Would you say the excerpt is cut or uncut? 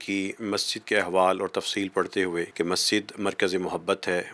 cut